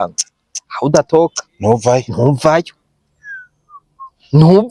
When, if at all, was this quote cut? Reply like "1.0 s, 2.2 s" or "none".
none